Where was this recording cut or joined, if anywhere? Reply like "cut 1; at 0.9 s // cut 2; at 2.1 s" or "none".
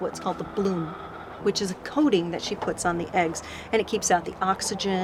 none